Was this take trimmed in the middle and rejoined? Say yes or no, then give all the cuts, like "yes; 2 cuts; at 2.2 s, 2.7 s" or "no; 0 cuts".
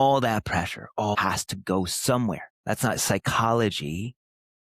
yes; 2 cuts; at 1.2 s, 2.5 s